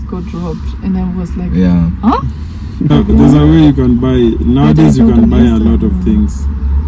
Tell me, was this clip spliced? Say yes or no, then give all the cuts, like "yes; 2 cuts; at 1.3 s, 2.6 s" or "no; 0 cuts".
yes; 1 cut; at 2.9 s